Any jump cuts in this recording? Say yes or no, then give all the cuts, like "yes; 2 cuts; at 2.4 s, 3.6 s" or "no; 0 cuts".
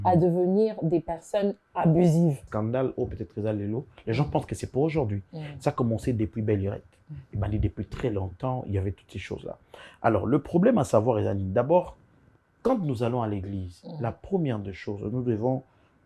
yes; 1 cut; at 2.5 s